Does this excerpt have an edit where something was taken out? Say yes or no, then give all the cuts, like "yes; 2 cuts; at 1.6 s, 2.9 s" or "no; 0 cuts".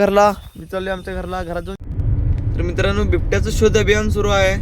yes; 1 cut; at 1.8 s